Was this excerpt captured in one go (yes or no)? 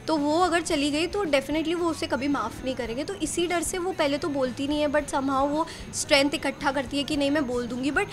yes